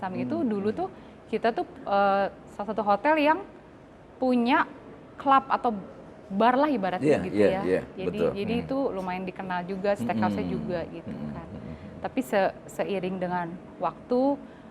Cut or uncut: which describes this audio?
uncut